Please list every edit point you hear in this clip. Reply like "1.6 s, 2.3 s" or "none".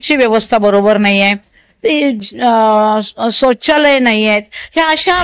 none